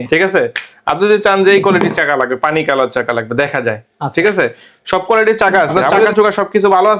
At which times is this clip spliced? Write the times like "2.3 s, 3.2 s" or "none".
6.1 s